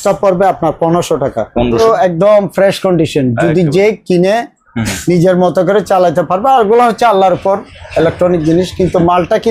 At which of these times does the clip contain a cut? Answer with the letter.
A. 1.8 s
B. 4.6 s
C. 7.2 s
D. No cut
A